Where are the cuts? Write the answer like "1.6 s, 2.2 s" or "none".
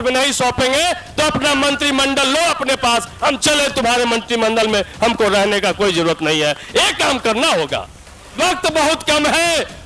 8.3 s

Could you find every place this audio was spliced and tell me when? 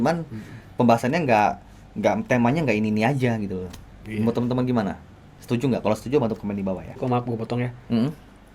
7.0 s

